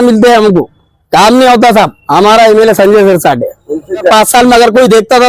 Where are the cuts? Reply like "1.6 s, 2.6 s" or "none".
2.0 s, 4.1 s